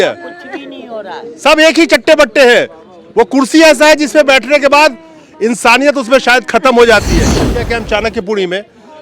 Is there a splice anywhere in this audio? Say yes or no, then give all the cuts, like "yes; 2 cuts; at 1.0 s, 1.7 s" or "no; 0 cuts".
yes; 1 cut; at 7.3 s